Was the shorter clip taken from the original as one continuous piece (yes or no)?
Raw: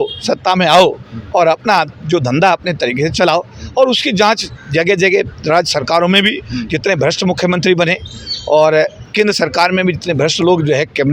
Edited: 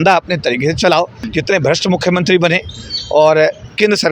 no